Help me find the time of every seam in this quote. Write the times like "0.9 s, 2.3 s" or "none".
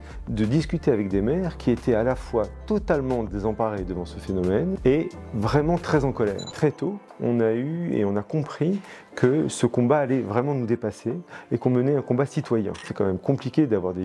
4.8 s, 6.4 s, 12.9 s